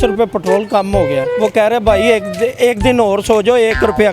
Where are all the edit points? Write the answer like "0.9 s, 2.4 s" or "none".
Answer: 1.2 s

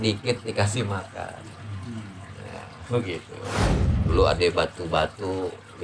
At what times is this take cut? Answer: 3.7 s

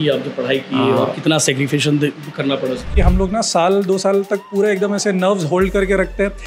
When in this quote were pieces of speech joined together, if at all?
2.9 s

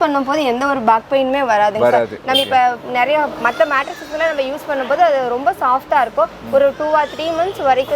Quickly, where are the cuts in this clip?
none

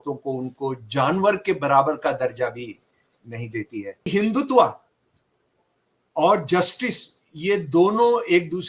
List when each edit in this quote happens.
4.1 s

